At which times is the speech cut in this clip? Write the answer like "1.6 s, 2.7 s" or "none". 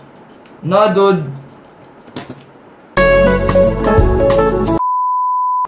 none